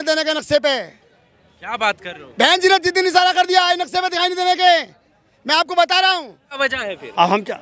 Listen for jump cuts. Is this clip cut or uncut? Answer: cut